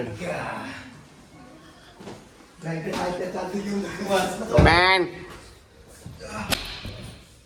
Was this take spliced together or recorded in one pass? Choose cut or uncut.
uncut